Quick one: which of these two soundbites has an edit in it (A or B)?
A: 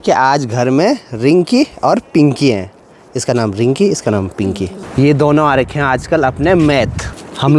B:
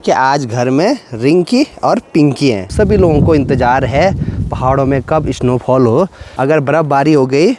B